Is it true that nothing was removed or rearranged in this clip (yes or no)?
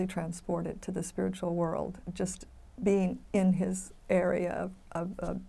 yes